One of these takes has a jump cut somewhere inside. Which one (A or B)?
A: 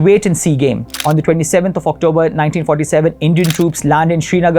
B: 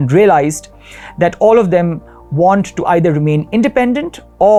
A